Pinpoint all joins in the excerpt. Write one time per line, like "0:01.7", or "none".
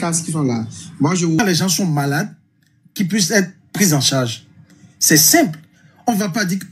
0:01.4